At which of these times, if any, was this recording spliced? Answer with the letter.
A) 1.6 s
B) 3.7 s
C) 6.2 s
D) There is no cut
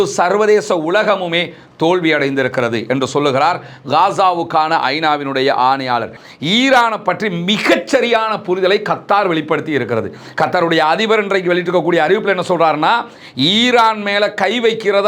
C